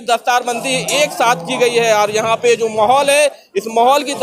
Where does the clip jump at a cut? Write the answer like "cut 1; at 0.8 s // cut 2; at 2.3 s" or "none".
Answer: none